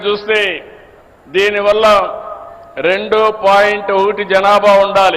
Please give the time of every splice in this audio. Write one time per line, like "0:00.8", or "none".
none